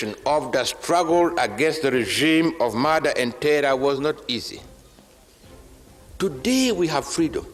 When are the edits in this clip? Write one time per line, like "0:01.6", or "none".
0:05.6